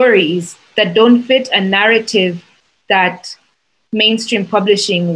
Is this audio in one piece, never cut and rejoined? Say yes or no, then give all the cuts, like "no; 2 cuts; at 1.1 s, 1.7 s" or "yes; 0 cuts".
yes; 0 cuts